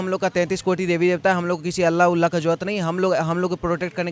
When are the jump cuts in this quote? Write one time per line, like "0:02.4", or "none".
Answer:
none